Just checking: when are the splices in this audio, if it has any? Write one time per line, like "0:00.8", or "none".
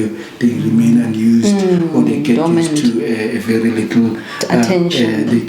none